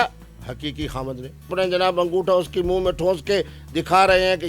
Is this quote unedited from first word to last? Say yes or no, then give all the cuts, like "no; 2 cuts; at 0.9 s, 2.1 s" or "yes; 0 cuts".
no; 1 cut; at 1.5 s